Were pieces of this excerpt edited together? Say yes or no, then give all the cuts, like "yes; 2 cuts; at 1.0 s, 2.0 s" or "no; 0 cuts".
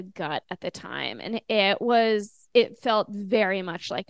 yes; 1 cut; at 2.4 s